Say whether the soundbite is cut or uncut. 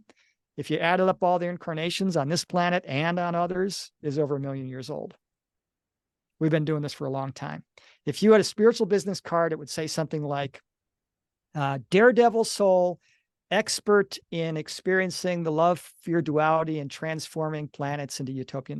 uncut